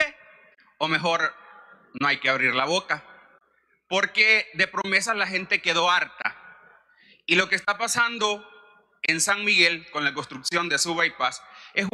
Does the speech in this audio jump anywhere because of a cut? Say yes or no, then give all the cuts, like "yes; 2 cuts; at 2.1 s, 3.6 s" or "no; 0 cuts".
no; 0 cuts